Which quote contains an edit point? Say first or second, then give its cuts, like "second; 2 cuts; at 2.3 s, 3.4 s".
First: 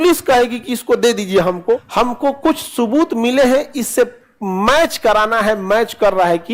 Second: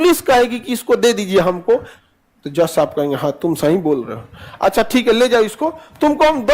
second; 1 cut; at 1.9 s